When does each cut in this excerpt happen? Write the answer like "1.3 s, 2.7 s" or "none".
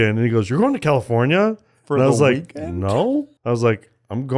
3.3 s